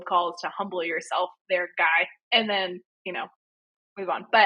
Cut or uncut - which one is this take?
uncut